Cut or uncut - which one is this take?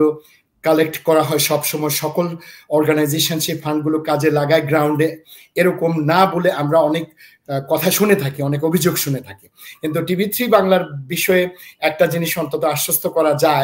uncut